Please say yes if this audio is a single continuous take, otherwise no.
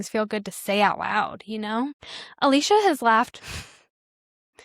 yes